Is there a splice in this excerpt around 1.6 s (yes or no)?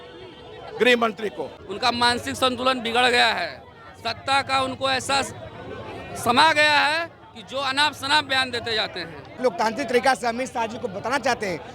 yes